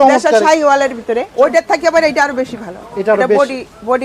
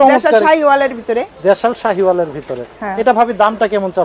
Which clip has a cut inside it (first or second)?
first